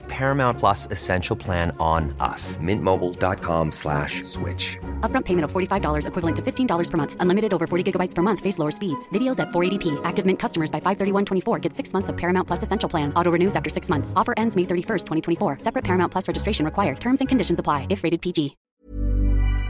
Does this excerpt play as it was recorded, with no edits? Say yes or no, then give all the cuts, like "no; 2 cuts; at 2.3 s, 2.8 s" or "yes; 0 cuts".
no; 1 cut; at 18.6 s